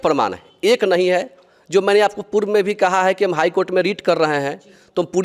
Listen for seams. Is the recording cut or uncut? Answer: uncut